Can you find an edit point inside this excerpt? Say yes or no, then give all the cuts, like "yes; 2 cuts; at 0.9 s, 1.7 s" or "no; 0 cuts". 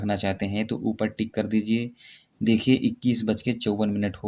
no; 0 cuts